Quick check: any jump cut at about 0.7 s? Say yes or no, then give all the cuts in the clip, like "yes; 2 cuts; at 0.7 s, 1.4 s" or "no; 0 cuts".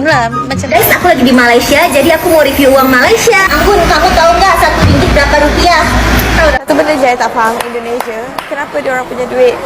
yes; 2 cuts; at 0.7 s, 6.6 s